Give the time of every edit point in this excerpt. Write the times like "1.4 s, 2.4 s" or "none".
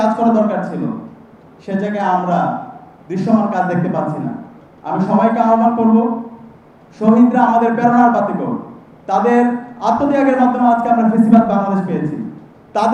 none